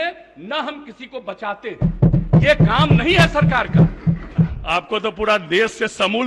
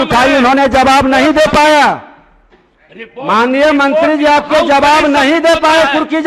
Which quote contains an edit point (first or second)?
first